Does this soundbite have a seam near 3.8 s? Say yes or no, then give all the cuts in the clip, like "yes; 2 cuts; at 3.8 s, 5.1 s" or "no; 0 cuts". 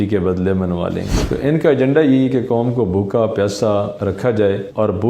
no; 1 cut; at 1.2 s